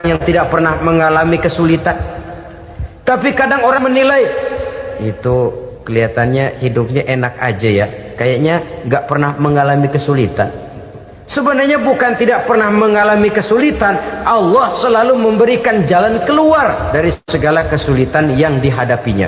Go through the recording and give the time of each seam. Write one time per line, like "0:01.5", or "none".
0:17.2